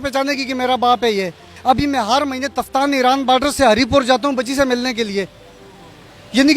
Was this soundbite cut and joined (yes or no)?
no